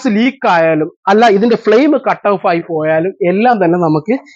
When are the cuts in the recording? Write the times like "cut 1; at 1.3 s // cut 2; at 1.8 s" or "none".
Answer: none